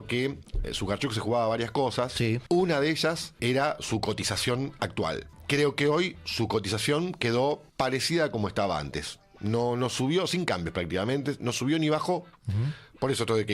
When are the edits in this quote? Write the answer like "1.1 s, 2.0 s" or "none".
2.4 s, 3.4 s, 5.3 s, 7.7 s